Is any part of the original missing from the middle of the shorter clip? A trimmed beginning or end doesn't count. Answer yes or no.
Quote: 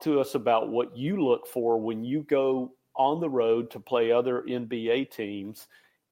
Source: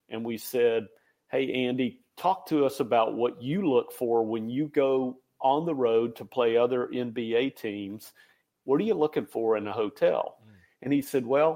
no